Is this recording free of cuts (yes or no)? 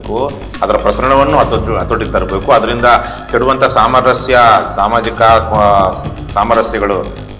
yes